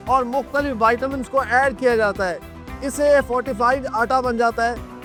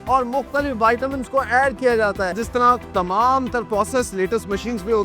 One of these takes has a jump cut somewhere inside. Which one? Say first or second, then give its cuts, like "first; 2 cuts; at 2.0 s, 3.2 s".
second; 1 cut; at 2.4 s